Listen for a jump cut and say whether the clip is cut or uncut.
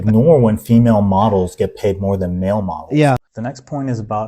cut